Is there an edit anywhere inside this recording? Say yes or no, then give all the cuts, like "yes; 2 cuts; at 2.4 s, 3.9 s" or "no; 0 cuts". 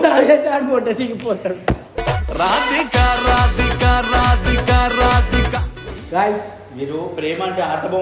no; 0 cuts